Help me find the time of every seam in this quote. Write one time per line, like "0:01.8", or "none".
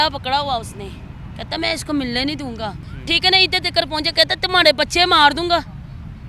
0:02.8